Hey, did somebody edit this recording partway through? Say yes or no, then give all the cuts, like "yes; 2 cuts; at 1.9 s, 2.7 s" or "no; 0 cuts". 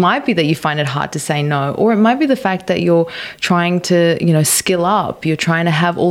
no; 0 cuts